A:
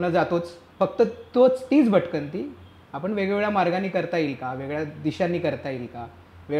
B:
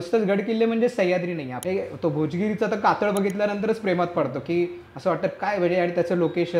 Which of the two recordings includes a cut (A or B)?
B